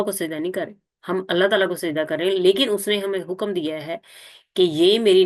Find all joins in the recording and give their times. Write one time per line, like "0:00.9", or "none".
none